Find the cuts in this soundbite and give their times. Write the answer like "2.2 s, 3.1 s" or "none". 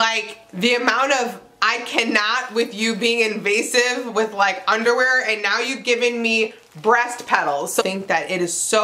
7.8 s